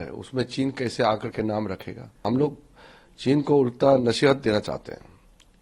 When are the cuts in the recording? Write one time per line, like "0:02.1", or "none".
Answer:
0:02.2